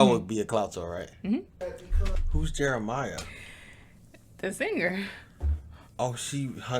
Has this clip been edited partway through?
yes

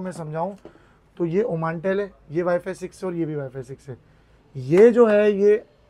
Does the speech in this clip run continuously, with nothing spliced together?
yes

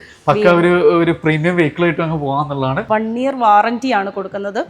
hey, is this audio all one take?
no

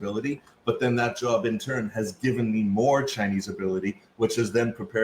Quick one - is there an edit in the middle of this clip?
no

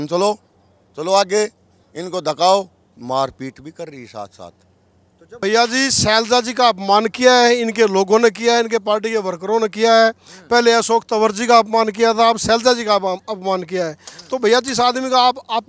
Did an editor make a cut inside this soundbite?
yes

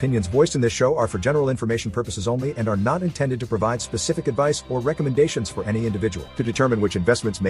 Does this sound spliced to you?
no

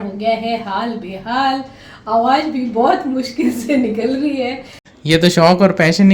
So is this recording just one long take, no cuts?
no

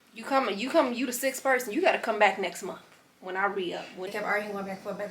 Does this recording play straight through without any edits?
no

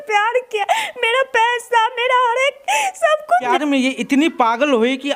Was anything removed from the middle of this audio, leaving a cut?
yes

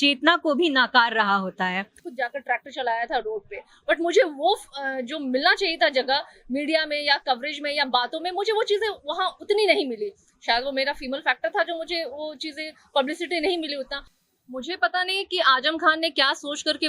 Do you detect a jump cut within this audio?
yes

